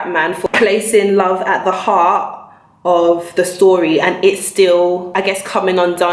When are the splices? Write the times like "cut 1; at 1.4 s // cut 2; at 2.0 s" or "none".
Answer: none